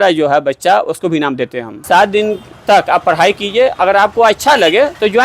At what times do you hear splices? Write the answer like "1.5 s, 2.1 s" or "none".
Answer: 1.7 s